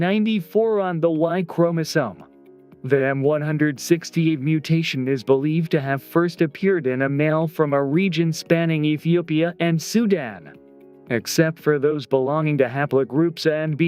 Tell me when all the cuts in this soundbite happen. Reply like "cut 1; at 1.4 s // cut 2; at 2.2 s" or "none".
cut 1; at 6.8 s